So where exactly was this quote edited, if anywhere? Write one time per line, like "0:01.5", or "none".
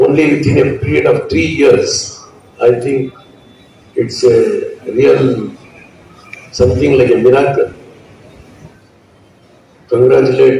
0:08.7